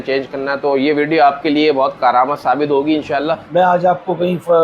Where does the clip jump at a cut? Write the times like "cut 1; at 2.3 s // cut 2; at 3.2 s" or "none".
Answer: cut 1; at 2.0 s // cut 2; at 3.4 s